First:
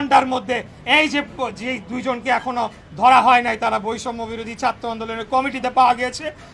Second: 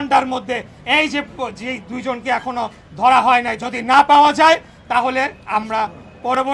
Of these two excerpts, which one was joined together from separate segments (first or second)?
second